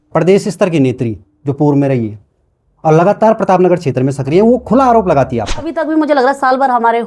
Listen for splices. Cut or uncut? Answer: cut